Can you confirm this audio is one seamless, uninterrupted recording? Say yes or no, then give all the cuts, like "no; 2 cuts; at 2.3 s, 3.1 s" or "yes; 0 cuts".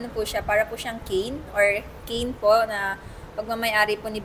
yes; 0 cuts